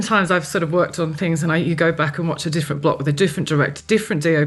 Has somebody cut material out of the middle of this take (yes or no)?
no